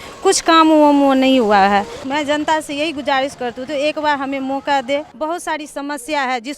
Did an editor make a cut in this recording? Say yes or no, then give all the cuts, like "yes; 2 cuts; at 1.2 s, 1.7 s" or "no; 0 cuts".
yes; 2 cuts; at 2.0 s, 5.1 s